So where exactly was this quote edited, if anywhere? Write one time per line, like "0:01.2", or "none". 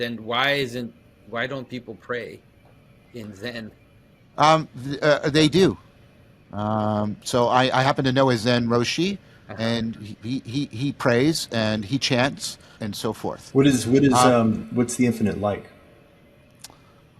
0:12.8